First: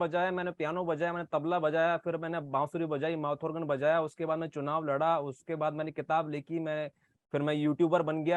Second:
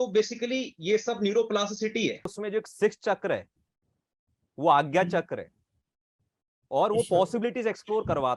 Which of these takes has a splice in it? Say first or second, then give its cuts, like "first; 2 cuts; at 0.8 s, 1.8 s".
second; 1 cut; at 2.3 s